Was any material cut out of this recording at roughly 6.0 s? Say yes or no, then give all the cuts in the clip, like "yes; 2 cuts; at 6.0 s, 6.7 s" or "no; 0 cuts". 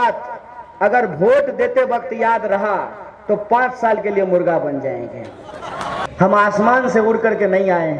yes; 1 cut; at 6.0 s